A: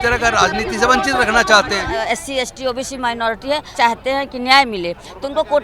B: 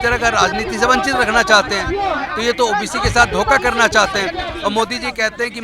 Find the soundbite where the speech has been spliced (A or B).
A